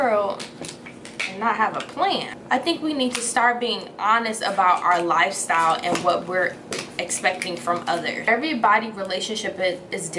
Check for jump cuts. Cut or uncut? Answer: cut